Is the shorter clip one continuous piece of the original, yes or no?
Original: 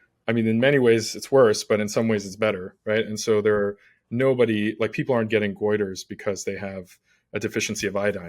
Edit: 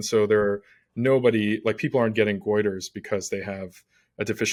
yes